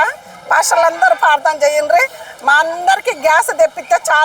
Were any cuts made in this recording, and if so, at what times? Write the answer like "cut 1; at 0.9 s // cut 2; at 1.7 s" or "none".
none